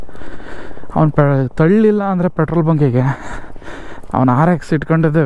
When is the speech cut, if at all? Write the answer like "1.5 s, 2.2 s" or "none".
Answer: none